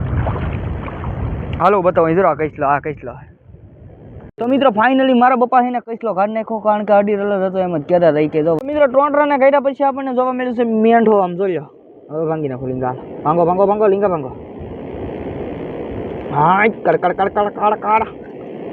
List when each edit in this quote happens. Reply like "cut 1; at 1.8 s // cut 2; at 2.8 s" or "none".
cut 1; at 4.3 s // cut 2; at 8.6 s